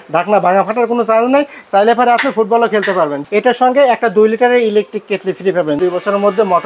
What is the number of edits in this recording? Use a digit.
2